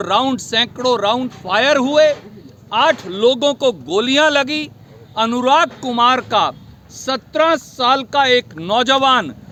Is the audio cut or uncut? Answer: uncut